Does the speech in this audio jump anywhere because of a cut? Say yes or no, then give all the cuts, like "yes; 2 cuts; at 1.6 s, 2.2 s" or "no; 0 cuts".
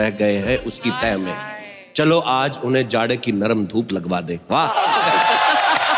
no; 0 cuts